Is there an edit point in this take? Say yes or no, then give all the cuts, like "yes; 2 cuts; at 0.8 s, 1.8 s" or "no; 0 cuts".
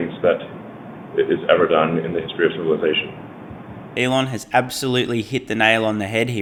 no; 0 cuts